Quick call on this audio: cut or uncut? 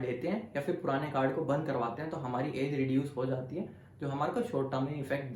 uncut